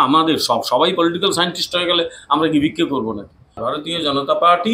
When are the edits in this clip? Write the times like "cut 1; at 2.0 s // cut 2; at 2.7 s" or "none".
cut 1; at 3.6 s